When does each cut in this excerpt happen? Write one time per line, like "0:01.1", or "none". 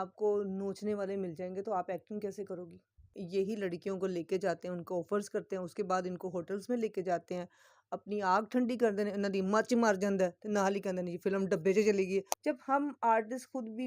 0:03.1
0:12.3

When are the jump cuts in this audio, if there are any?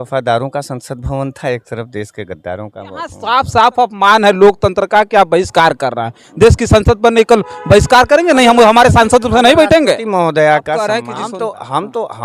0:03.2
0:11.0

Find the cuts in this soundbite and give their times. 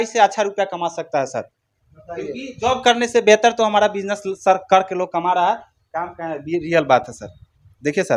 none

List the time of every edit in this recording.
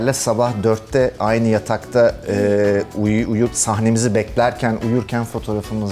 none

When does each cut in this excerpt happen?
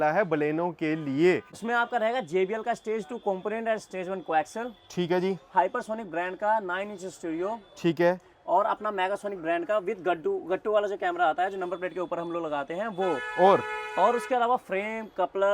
0:01.5

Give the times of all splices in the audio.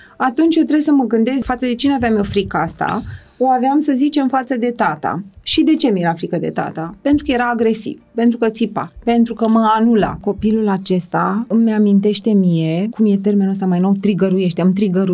0:01.4
0:10.2
0:11.5
0:12.9

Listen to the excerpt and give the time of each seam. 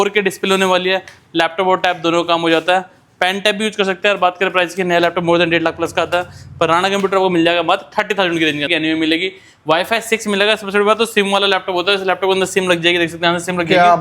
0:08.7

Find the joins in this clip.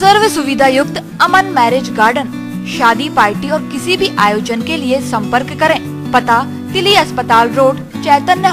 none

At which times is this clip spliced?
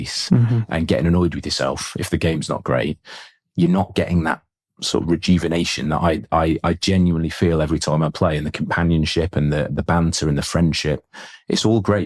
none

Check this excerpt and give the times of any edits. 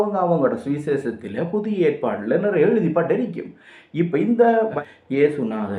0:04.7

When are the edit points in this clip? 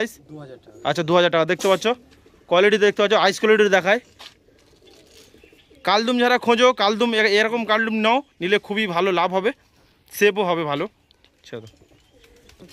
0:05.3

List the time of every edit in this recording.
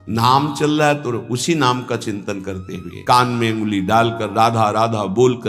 0:02.9

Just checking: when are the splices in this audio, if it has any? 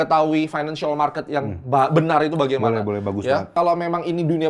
0:03.5

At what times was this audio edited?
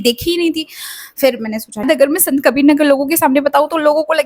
0:01.8

